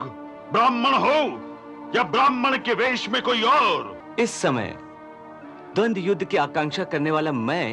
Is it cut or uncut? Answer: cut